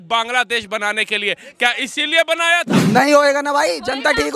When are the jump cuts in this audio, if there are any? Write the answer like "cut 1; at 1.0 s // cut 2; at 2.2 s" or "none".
cut 1; at 2.8 s